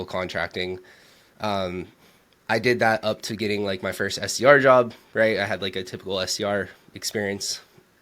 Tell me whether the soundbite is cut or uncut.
uncut